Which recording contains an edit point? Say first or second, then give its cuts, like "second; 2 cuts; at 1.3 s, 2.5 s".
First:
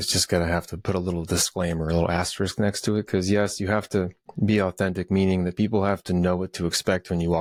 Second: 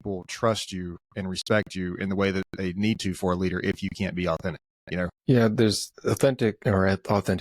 second; 3 cuts; at 5.2 s, 5.9 s, 6.6 s